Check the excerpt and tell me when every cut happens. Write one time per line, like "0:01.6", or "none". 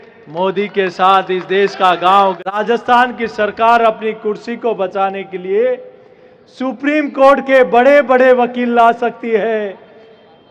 0:02.6